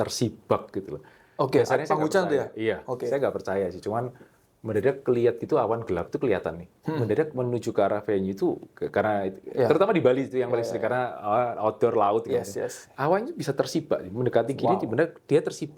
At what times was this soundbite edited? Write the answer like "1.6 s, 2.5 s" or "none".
none